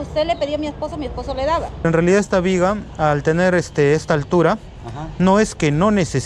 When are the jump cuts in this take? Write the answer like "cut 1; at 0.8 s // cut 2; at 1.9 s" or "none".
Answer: cut 1; at 1.8 s